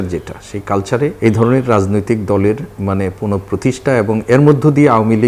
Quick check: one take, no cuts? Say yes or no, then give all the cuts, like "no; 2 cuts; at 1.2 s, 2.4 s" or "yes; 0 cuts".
no; 1 cut; at 1.2 s